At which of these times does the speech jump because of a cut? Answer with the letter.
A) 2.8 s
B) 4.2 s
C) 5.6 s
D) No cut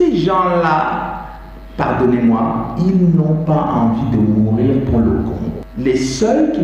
C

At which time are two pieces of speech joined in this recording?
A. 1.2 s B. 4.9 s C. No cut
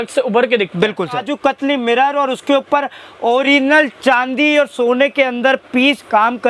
A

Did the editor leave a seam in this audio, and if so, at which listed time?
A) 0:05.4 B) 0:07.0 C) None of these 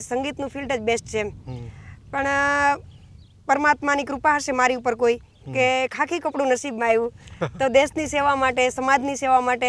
C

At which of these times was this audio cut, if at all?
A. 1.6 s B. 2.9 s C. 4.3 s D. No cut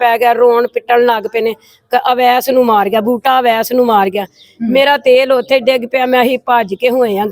D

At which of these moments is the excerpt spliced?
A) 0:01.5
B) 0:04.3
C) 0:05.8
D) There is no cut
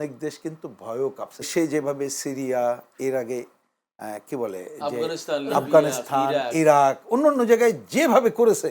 A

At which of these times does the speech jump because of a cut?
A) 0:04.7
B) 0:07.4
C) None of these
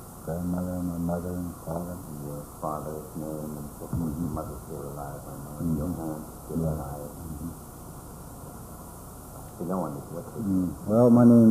A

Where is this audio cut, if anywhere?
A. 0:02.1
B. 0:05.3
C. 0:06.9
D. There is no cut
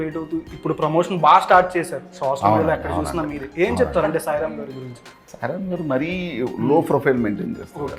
B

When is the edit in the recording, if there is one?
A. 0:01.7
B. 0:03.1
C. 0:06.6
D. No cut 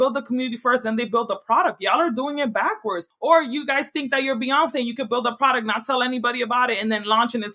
B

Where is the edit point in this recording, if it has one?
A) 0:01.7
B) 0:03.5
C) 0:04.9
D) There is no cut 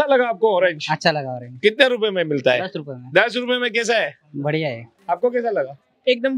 C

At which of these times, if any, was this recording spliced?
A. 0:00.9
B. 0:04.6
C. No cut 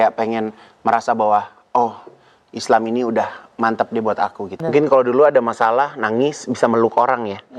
B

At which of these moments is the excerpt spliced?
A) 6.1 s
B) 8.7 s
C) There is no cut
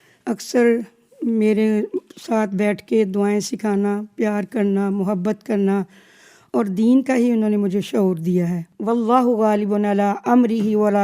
B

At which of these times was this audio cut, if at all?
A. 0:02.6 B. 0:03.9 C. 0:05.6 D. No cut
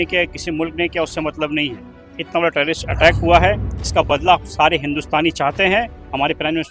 D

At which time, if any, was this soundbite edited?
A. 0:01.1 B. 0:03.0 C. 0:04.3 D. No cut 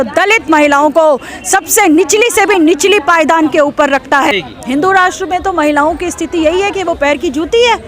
C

